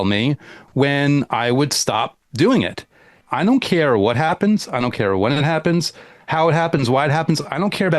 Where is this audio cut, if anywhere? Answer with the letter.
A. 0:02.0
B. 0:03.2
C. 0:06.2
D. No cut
B